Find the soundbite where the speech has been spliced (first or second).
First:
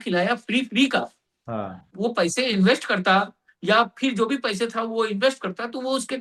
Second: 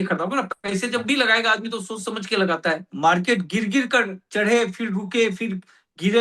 second